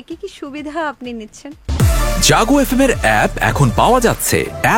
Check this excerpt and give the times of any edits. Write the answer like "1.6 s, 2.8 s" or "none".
1.6 s